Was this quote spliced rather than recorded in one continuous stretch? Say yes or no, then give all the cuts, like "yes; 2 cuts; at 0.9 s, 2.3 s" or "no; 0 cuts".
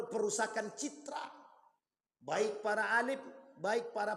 no; 0 cuts